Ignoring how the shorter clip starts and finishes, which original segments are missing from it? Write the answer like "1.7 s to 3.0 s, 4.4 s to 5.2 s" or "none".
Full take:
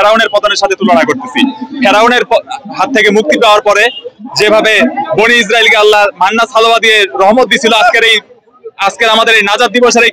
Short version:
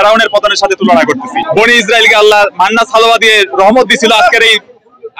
1.3 s to 4.9 s